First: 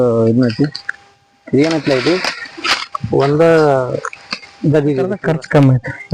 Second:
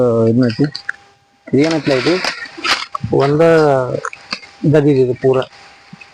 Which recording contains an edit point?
first; 1 cut; at 5.2 s

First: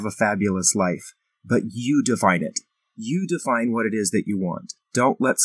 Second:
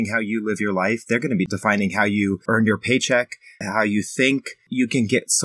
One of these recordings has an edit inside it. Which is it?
second; 4 cuts; at 1.5 s, 2.4 s, 3.6 s, 4.7 s

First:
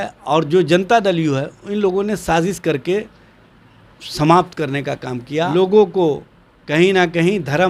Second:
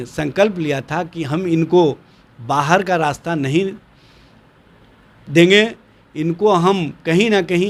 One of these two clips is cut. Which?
first; 1 cut; at 5.5 s

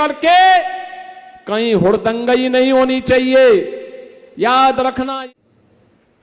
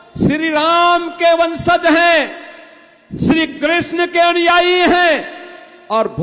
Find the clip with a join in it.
first; 1 cut; at 5.1 s

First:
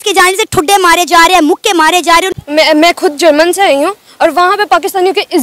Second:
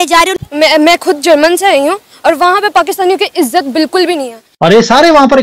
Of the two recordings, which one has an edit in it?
second; 1 cut; at 4.4 s

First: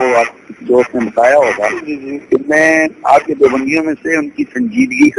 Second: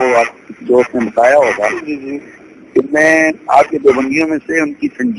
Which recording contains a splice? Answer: first; 1 cut; at 2.1 s

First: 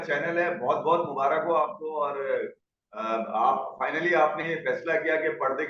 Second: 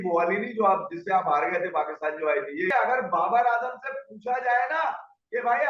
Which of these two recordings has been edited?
second; 1 cut; at 2.7 s

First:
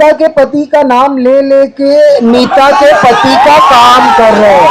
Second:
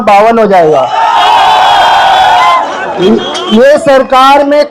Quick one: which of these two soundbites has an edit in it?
second; 1 cut; at 2.6 s

